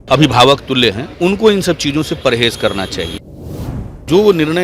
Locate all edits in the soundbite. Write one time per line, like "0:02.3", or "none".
0:01.1
0:03.7